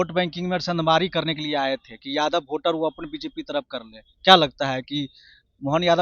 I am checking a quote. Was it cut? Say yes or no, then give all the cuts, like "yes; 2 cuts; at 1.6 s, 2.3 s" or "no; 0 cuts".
no; 0 cuts